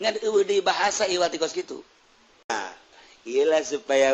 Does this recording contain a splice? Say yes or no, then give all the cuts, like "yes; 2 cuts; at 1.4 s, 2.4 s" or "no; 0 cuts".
yes; 1 cut; at 2.5 s